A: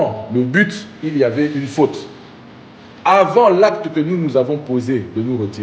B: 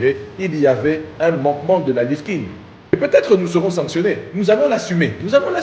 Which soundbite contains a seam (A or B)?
B